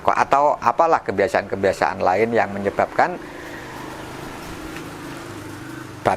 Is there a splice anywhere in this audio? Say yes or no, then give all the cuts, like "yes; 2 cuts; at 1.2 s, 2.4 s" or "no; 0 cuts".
no; 0 cuts